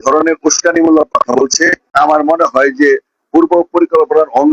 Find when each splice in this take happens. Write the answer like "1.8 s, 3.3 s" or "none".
1.9 s